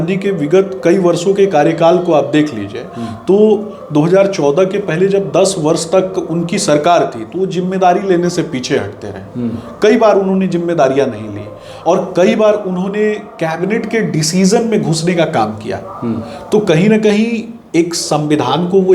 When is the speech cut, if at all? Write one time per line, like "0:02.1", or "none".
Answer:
none